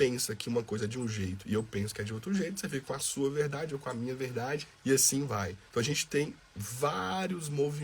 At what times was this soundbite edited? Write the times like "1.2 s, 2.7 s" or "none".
4.7 s, 5.6 s